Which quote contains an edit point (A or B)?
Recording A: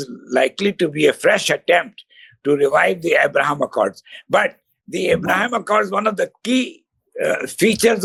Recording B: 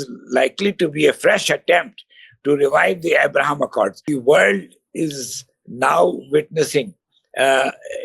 B